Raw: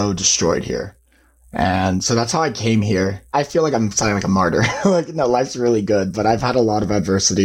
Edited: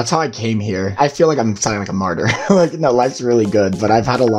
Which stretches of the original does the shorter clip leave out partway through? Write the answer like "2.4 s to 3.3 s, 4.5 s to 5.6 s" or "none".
3.1 s to 3.3 s